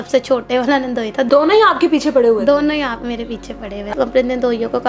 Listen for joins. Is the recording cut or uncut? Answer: cut